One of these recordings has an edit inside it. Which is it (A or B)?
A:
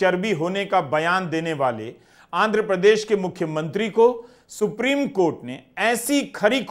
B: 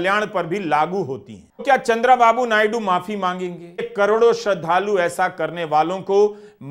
B